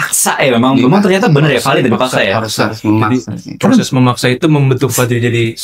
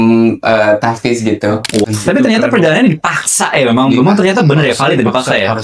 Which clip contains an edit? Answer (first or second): second